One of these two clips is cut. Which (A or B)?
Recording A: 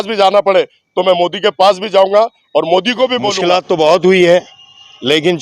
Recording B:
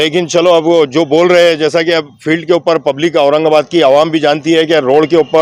A